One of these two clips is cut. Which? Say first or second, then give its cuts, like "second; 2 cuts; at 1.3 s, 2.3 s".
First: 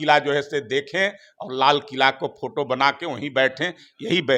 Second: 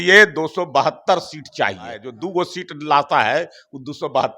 second; 1 cut; at 2.1 s